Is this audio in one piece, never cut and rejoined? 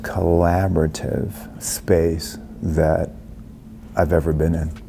no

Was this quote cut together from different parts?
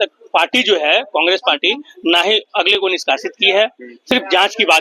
no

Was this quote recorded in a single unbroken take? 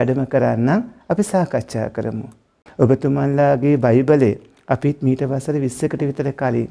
no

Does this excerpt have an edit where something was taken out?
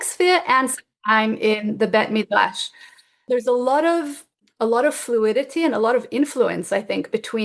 yes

